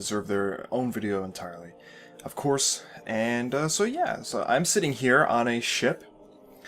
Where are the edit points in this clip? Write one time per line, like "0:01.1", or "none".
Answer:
0:02.6